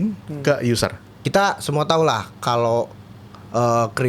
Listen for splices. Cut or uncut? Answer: cut